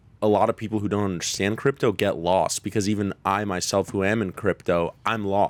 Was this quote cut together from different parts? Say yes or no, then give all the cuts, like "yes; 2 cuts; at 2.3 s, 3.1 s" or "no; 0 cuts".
no; 0 cuts